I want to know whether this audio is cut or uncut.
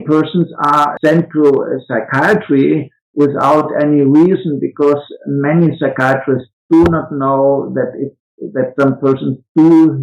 cut